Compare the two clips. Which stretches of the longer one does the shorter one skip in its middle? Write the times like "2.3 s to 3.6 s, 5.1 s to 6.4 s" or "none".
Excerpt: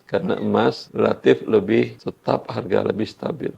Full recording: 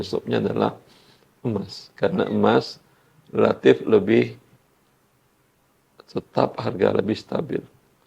2.7 s to 3.2 s, 4.4 s to 6.1 s